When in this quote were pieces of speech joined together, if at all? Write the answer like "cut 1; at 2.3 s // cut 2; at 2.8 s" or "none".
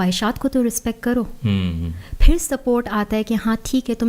none